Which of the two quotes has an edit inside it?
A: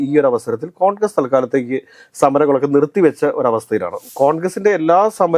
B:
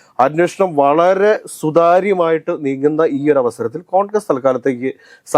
A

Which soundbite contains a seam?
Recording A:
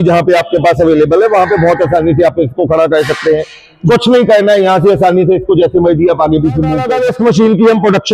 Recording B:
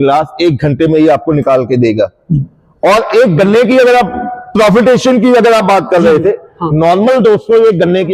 A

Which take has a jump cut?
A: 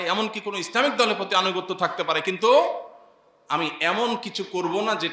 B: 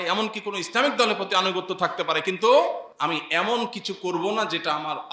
B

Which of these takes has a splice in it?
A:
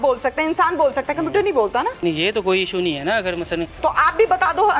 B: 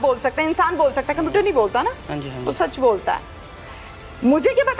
A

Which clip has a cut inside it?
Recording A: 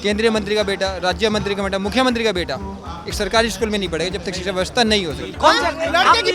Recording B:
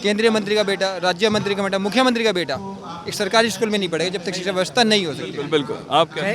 A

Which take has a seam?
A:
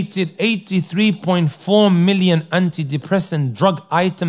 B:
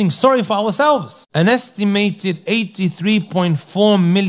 B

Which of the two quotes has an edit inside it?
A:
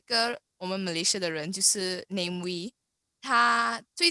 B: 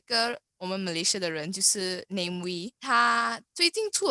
B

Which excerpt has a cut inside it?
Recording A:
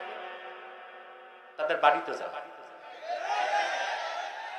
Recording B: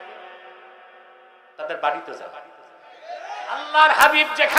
B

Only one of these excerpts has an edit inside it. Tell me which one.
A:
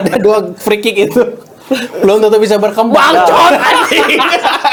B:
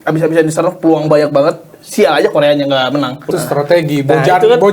B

